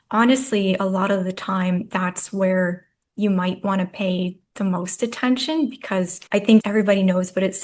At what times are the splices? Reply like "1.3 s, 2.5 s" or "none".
4.4 s, 6.5 s